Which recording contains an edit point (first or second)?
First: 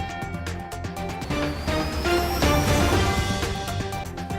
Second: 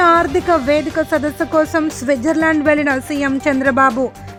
first